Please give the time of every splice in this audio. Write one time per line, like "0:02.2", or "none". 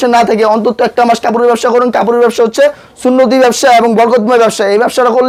none